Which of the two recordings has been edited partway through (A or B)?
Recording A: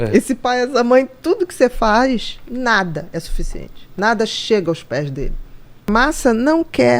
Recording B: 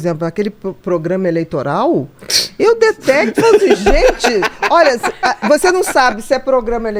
A